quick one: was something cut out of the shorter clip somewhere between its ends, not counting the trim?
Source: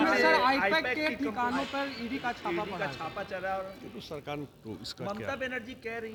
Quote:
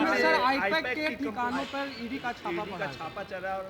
no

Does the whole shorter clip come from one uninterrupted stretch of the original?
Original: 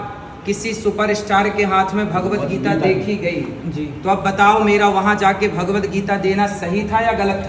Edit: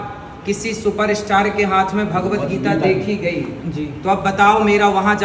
yes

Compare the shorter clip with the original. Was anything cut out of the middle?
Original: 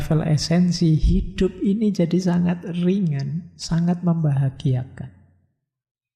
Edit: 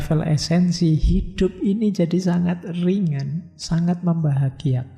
no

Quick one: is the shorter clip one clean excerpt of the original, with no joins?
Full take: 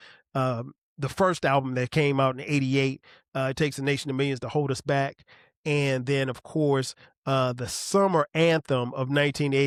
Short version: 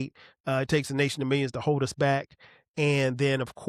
yes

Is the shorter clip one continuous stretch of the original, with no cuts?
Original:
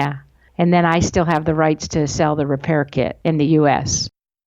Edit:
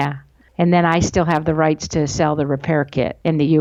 yes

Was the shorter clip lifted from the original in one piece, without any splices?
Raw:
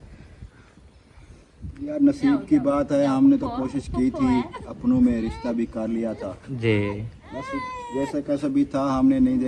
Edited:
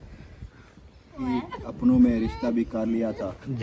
no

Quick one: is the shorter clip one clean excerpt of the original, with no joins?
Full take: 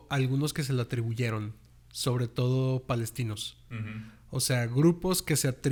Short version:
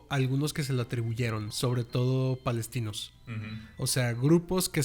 no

